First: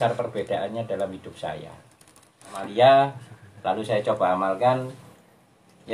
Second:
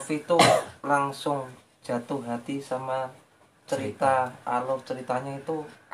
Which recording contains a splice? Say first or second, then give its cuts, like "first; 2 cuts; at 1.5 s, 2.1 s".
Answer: first; 1 cut; at 2.6 s